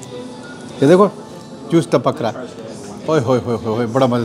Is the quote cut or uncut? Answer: uncut